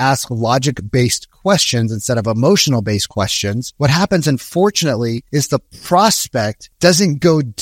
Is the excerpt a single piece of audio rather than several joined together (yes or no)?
no